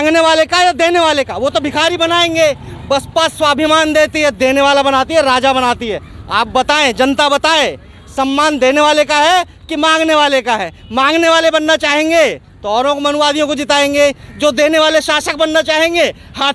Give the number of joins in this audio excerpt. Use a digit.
0